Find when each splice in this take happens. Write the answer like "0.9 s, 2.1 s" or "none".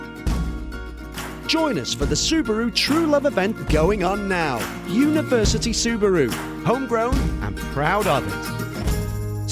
none